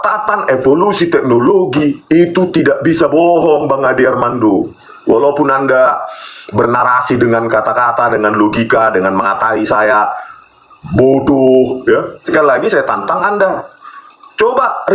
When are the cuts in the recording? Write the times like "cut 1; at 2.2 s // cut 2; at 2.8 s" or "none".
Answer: cut 1; at 12.3 s